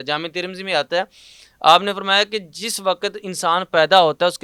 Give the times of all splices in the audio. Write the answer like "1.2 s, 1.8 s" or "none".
none